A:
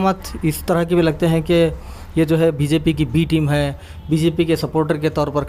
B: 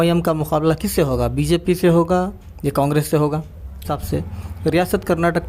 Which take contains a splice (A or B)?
B